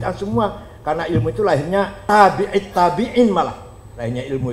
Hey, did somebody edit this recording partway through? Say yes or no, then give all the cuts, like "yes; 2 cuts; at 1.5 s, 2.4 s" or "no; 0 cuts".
yes; 1 cut; at 2.0 s